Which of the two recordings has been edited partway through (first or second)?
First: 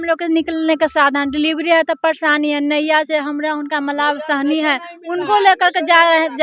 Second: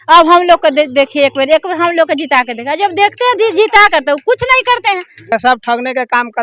second